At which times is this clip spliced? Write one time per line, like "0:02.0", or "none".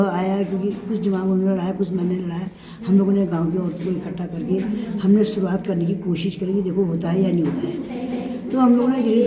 none